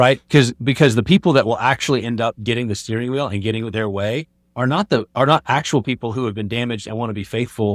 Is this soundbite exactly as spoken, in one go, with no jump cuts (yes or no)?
yes